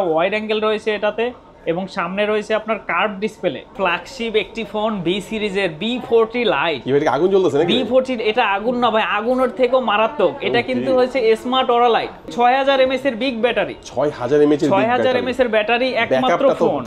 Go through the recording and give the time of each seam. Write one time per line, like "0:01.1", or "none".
0:03.7
0:12.3